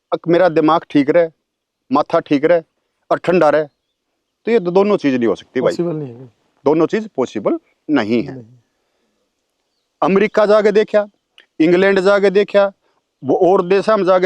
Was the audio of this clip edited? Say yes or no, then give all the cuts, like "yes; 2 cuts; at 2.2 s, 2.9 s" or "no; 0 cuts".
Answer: no; 0 cuts